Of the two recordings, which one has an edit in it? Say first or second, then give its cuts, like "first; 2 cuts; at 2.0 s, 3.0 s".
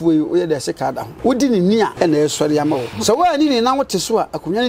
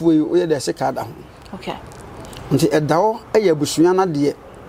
first; 3 cuts; at 1.1 s, 1.9 s, 2.9 s